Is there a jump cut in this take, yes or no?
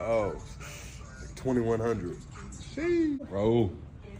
yes